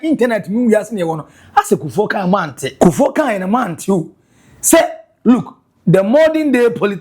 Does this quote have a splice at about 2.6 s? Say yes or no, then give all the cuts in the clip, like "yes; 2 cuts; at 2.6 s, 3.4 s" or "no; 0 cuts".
yes; 1 cut; at 2.6 s